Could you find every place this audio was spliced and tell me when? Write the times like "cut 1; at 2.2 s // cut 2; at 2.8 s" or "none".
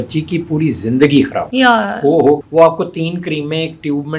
cut 1; at 2.4 s